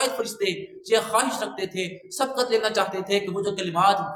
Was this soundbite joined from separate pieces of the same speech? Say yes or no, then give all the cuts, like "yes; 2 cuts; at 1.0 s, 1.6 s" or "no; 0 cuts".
no; 0 cuts